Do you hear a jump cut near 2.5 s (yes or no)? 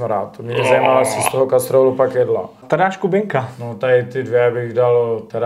yes